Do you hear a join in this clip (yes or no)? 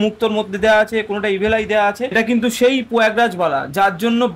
yes